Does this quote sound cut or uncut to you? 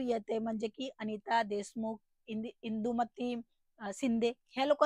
uncut